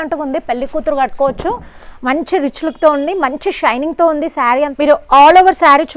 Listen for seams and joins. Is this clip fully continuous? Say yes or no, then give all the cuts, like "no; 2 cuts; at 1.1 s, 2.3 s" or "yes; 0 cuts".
no; 1 cut; at 4.6 s